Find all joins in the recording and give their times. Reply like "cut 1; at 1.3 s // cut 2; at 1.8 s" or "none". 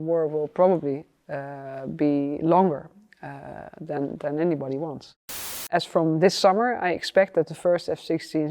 cut 1; at 5.7 s